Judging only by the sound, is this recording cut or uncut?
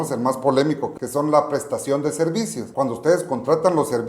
cut